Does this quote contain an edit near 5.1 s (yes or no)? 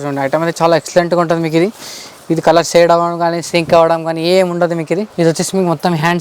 yes